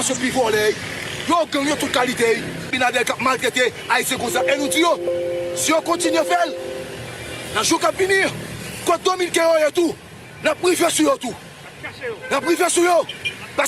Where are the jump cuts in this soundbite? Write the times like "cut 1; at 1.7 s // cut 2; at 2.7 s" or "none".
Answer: cut 1; at 2.7 s